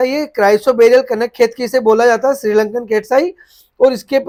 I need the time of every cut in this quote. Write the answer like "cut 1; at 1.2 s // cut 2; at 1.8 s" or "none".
none